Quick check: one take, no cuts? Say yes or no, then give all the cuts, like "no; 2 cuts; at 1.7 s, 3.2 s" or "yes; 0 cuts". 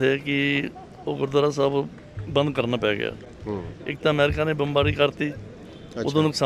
yes; 0 cuts